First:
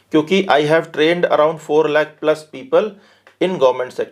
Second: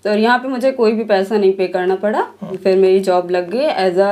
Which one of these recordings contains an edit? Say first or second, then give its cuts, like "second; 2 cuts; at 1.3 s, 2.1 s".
second; 1 cut; at 2.6 s